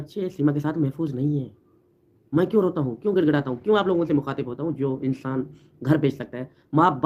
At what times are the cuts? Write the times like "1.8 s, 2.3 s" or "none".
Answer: none